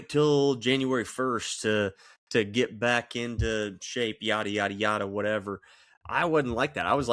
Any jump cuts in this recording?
no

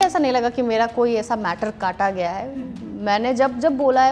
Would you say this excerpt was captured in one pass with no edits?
yes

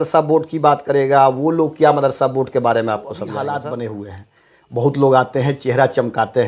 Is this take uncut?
no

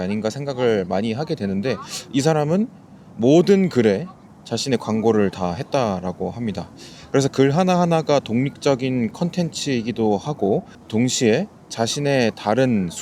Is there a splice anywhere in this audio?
no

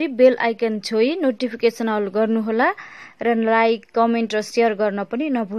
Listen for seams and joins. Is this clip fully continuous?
yes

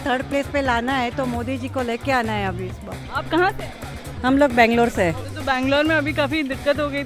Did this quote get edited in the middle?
no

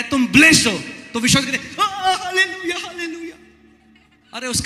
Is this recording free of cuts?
yes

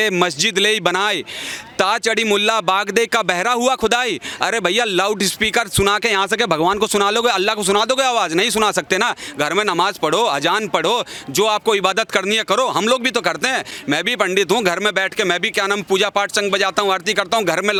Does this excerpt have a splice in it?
no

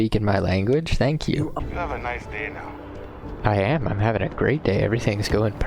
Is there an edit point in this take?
yes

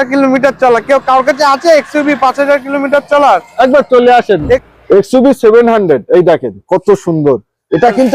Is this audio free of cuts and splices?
no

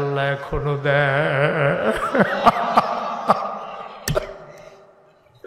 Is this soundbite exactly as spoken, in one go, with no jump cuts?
yes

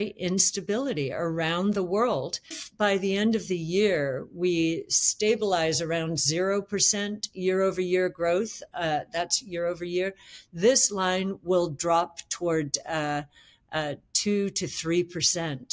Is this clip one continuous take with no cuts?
no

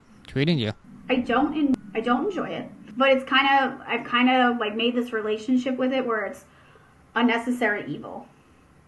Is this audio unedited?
no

